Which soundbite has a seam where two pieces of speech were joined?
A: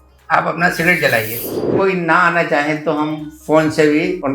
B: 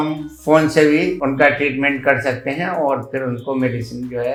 A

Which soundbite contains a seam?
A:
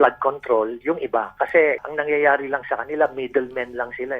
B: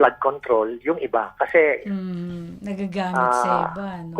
A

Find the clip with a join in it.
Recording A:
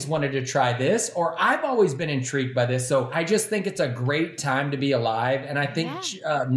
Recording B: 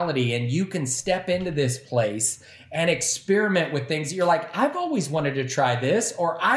A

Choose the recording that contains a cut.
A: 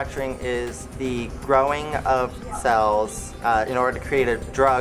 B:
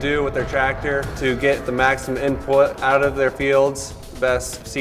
A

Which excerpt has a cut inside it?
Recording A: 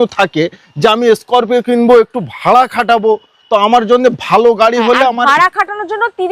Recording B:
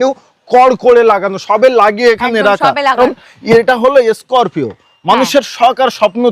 B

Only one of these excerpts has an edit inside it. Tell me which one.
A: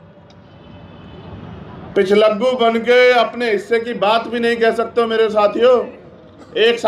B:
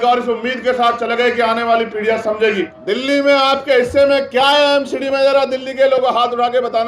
B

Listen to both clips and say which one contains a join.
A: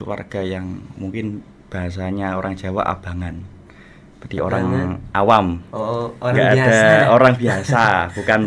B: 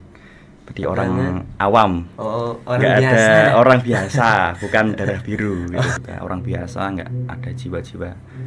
B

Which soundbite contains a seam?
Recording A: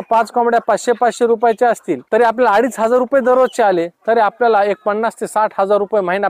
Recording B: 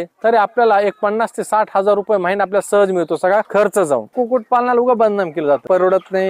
B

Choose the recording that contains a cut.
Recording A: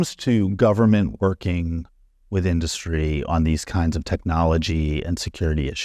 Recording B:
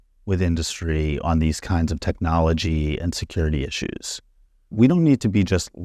B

